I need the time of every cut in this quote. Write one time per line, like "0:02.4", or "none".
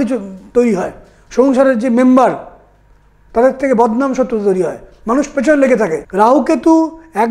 0:06.0